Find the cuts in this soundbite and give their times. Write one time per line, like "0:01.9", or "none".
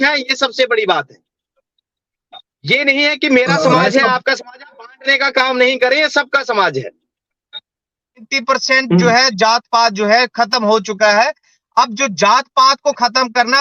0:08.3